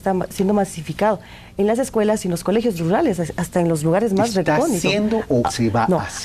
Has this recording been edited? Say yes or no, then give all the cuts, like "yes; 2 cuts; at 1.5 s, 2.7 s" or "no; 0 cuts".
yes; 1 cut; at 2.8 s